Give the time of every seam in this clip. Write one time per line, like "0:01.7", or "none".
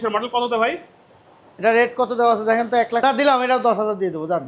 0:03.0